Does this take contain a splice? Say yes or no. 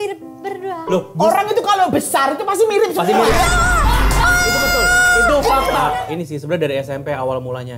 yes